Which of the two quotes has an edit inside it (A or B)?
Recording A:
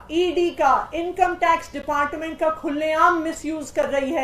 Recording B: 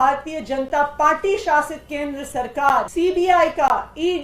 B